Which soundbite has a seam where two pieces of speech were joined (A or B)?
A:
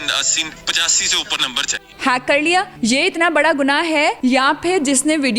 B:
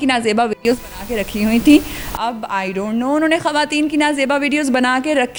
A